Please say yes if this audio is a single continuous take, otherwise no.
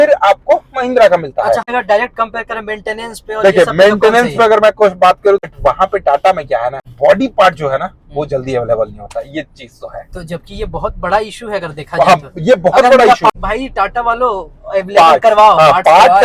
no